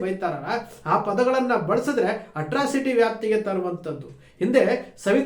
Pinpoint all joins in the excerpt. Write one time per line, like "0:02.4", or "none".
none